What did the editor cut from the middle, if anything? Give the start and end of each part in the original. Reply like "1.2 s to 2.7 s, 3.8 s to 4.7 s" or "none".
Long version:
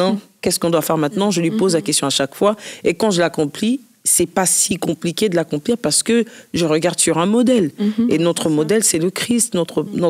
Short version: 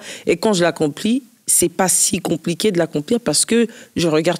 none